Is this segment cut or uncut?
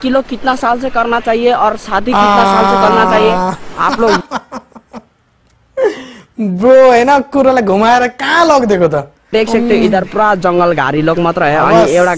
uncut